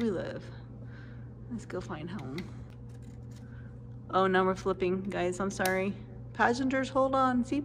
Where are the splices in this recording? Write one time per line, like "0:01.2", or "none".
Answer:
0:02.7

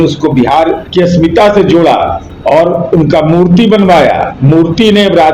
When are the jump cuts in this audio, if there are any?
0:00.8
0:02.3
0:04.3

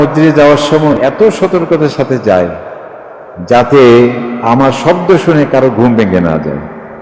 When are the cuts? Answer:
0:01.0

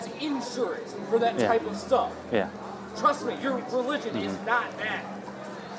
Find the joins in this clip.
none

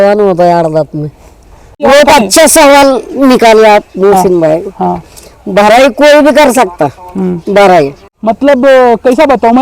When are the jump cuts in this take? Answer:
0:01.8
0:08.1

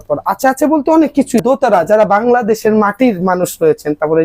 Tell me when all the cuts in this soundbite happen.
0:01.4

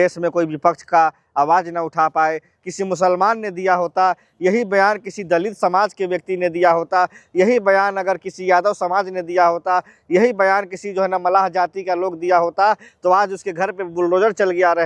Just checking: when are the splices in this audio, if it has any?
0:02.5

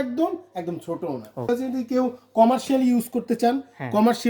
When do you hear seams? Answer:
0:01.5

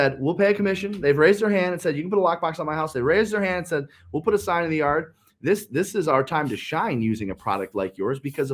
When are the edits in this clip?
none

